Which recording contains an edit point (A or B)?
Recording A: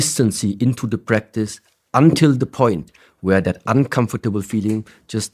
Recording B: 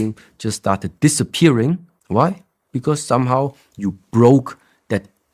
B